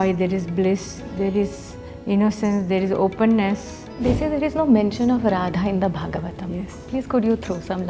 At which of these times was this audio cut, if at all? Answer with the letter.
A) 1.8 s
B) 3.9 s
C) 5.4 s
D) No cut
B